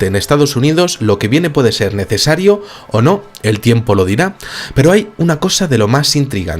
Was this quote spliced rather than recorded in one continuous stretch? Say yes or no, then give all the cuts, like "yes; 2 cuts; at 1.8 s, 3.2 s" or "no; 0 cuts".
yes; 1 cut; at 4.3 s